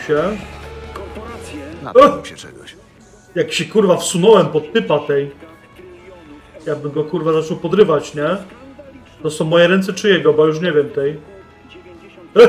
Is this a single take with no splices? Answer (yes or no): yes